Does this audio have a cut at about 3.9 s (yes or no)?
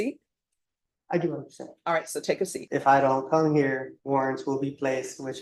yes